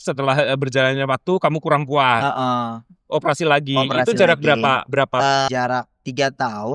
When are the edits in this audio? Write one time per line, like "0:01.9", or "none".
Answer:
0:05.5